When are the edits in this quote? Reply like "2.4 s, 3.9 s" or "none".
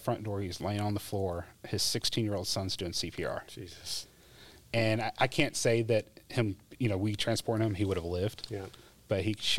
none